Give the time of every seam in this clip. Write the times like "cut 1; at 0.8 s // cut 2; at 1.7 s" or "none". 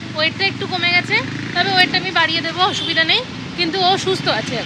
none